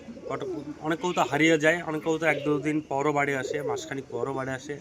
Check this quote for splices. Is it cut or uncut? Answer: uncut